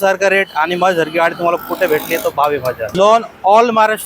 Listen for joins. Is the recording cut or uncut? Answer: cut